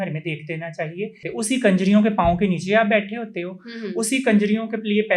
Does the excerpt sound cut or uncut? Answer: cut